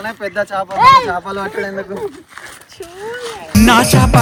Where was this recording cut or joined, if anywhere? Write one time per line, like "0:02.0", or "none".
none